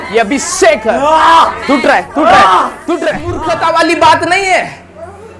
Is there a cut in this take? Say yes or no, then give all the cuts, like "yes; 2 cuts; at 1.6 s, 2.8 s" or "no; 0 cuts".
yes; 1 cut; at 3.3 s